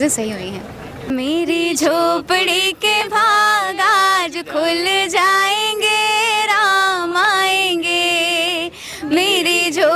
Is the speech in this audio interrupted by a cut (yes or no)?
yes